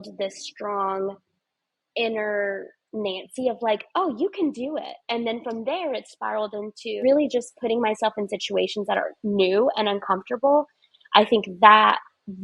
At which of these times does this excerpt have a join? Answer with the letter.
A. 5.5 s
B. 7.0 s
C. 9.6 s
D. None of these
B